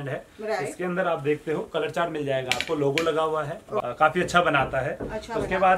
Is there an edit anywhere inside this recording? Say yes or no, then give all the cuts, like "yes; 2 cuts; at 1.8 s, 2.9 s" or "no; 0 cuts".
yes; 1 cut; at 3.8 s